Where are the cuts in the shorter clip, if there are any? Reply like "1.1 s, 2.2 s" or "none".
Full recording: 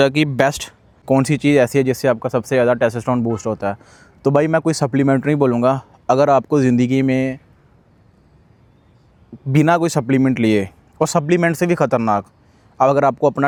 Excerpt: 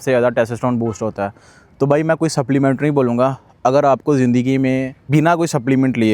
5.0 s